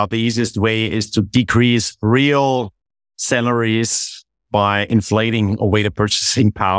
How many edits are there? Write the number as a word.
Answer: zero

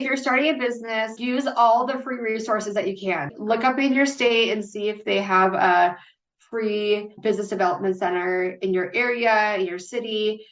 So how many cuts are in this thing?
three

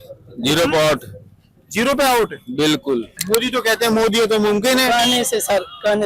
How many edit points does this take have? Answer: one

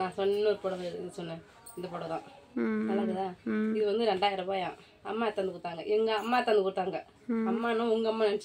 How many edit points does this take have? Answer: zero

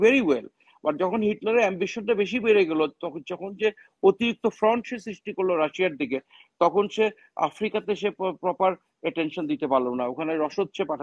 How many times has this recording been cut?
zero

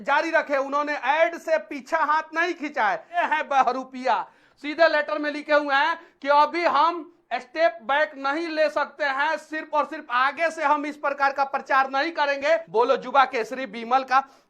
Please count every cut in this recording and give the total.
two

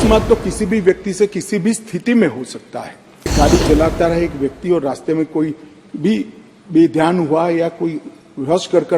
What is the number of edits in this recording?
one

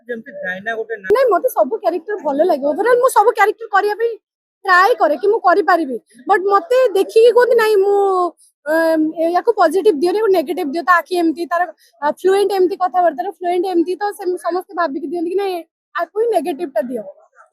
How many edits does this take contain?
one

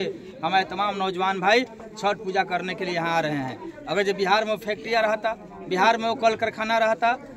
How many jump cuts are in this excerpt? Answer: zero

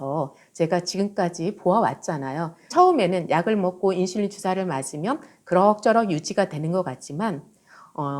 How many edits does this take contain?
one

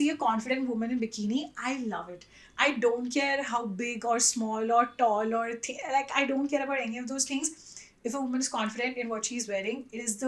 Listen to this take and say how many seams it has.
zero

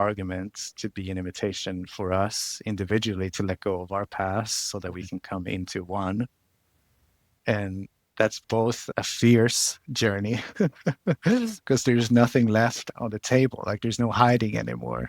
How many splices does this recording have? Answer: three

